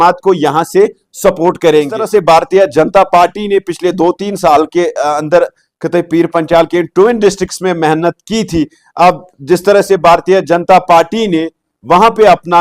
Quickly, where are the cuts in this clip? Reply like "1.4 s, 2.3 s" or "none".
2.0 s